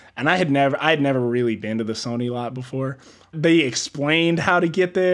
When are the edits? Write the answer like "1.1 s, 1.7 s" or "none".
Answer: none